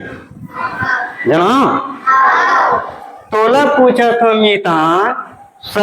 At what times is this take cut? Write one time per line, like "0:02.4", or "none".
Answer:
none